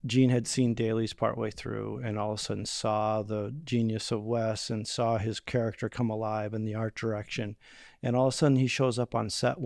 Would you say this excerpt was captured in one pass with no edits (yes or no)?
yes